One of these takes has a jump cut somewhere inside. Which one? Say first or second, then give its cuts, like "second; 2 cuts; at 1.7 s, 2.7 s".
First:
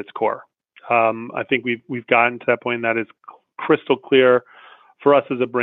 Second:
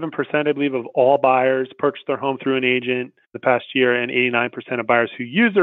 second; 1 cut; at 3.3 s